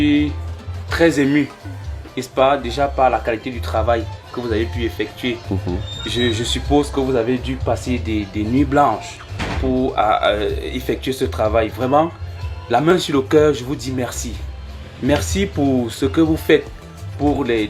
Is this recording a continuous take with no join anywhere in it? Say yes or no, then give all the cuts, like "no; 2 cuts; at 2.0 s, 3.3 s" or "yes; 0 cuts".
yes; 0 cuts